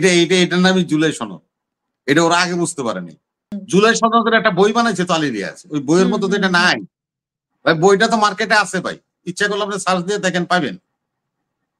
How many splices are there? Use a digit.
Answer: 1